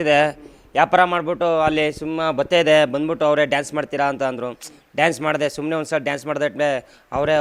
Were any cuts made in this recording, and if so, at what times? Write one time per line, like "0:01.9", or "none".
none